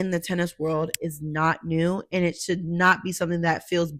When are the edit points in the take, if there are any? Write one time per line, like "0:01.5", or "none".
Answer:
none